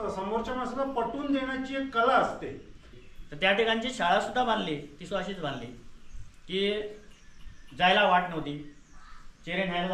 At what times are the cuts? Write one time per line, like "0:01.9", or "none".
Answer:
0:02.7